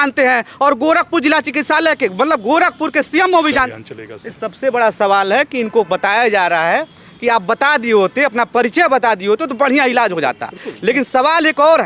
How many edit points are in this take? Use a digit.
1